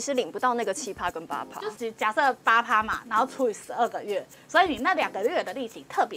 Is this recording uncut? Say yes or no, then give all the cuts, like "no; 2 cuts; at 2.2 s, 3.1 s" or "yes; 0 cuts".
no; 1 cut; at 1.5 s